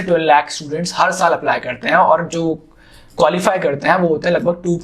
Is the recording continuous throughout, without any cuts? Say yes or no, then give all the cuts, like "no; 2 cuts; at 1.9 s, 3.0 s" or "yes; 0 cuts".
yes; 0 cuts